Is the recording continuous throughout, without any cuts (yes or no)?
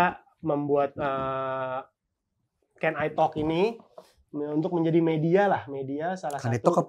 yes